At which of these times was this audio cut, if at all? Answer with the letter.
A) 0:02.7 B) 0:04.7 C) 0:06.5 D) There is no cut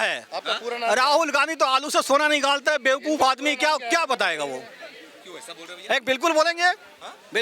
D